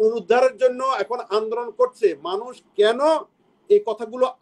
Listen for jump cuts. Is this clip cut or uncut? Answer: uncut